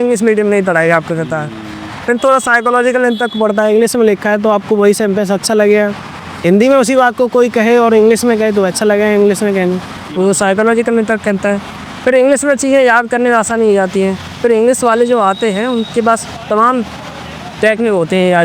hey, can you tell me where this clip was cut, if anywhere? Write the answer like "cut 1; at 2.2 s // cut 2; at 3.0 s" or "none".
none